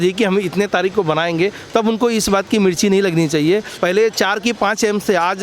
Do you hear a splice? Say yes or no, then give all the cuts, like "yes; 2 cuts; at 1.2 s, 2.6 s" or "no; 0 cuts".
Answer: yes; 1 cut; at 3.7 s